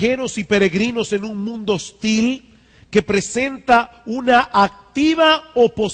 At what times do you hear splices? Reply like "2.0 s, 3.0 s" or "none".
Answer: 3.9 s